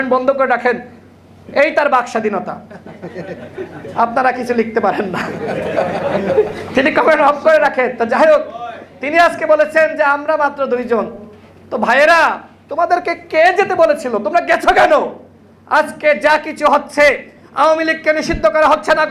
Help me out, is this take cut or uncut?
uncut